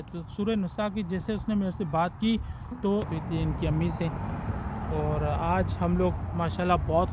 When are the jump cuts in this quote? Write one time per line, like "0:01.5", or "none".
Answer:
0:03.1